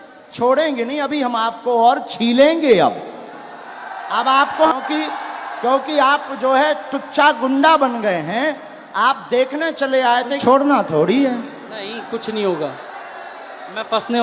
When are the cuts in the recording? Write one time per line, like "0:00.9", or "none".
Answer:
0:04.7
0:10.4